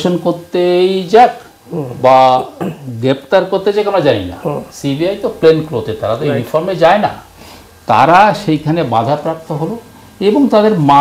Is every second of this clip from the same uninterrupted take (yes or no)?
yes